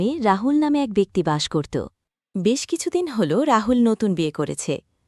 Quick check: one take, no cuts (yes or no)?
yes